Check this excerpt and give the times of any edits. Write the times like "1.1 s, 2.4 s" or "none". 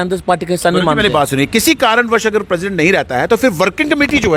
none